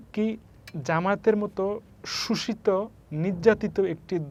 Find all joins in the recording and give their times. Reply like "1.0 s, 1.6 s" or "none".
none